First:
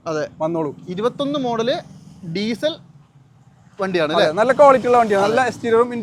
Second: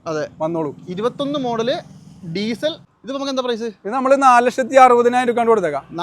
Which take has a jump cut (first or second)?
second